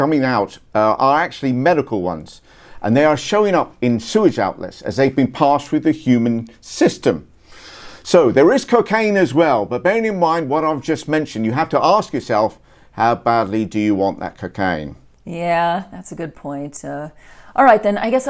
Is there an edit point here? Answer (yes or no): no